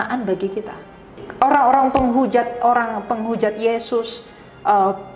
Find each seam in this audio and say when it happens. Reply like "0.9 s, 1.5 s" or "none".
1.2 s